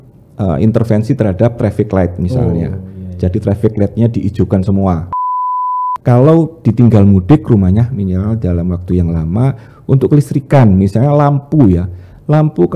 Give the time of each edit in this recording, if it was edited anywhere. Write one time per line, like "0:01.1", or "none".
0:05.4